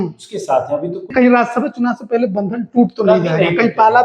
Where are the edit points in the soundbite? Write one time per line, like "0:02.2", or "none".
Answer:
0:01.1